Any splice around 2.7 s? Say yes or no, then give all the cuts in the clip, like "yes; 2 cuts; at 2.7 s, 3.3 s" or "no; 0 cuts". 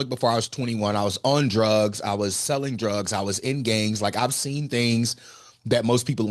no; 0 cuts